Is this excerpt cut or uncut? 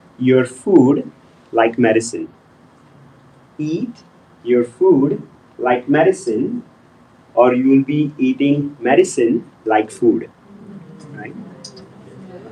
uncut